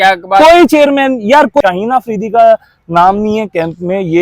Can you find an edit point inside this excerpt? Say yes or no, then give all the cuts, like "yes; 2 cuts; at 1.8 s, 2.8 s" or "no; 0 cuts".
yes; 1 cut; at 1.6 s